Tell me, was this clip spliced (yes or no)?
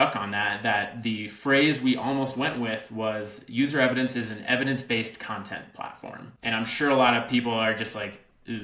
yes